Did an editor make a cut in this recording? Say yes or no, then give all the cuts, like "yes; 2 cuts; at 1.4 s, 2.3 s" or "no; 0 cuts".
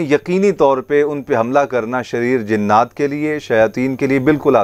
no; 0 cuts